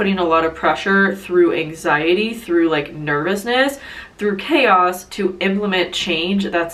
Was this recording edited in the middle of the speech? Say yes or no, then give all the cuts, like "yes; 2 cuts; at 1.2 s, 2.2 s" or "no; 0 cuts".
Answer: no; 0 cuts